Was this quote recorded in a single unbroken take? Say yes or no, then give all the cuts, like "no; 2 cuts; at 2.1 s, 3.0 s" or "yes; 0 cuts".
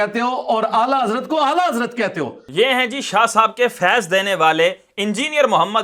yes; 0 cuts